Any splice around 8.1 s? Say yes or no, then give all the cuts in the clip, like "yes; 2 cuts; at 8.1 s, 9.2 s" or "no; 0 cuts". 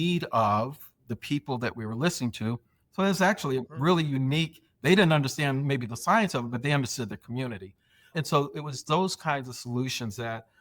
yes; 3 cuts; at 0.9 s, 2.8 s, 8.1 s